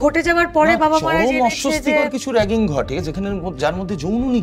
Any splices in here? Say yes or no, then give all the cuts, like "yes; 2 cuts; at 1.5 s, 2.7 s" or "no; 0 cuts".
no; 0 cuts